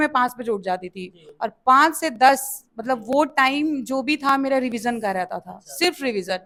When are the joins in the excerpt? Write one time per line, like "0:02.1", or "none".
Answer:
none

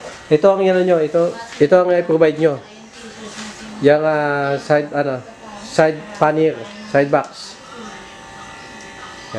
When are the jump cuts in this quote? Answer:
none

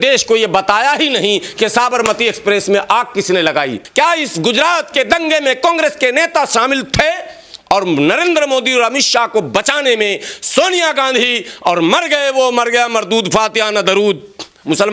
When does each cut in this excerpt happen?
0:03.8

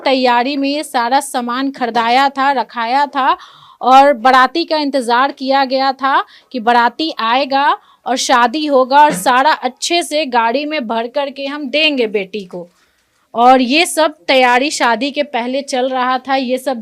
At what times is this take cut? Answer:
none

